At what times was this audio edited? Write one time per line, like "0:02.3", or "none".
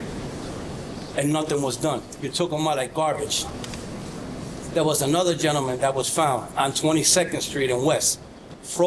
none